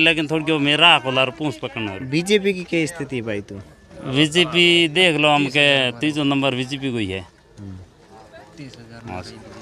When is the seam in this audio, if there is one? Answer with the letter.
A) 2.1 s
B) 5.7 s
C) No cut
C